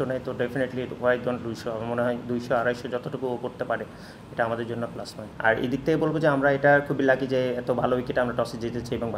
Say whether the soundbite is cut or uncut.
cut